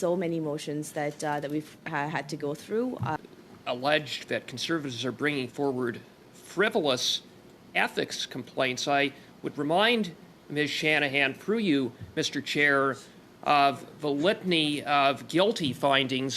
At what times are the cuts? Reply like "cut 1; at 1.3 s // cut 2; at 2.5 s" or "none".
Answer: cut 1; at 3.2 s